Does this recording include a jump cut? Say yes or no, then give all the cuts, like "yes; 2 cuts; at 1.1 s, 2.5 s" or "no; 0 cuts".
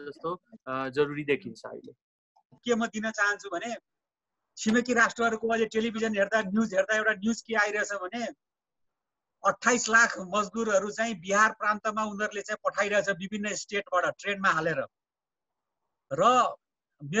yes; 1 cut; at 2.6 s